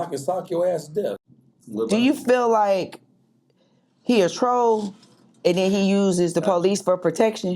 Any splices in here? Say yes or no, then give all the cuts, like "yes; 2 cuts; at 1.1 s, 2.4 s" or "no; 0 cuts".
yes; 1 cut; at 1.2 s